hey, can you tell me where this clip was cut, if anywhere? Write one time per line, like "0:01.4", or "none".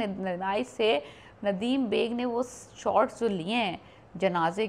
none